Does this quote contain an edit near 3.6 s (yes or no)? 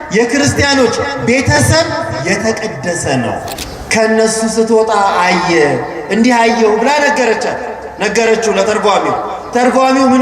yes